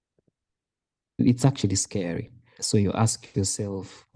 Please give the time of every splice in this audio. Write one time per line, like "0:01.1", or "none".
0:02.6